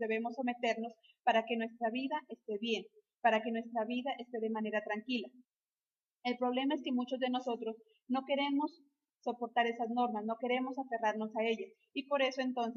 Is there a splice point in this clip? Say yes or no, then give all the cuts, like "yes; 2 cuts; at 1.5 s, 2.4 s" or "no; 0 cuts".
no; 0 cuts